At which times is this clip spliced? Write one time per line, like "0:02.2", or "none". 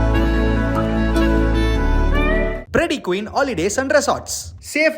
0:02.6